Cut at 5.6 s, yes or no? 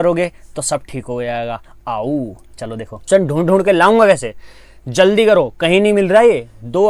no